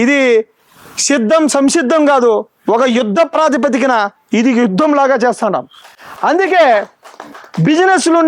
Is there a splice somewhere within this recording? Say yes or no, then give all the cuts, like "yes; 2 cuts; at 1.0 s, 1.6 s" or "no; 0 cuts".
no; 0 cuts